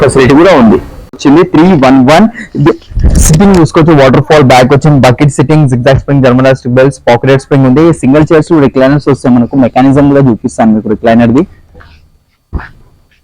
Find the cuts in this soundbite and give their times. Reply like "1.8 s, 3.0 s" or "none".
1.4 s